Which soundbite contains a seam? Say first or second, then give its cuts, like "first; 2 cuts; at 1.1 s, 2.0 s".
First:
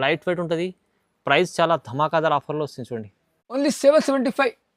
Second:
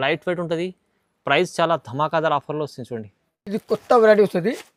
first; 1 cut; at 3.5 s